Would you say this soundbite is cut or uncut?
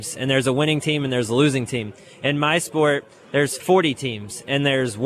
cut